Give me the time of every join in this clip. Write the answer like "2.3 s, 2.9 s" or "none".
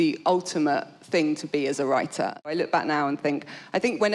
2.5 s